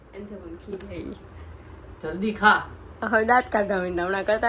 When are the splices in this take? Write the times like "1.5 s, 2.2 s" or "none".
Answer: none

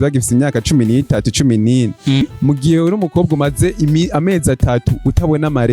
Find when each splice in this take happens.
2.2 s

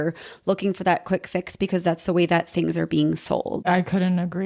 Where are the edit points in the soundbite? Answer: 3.6 s

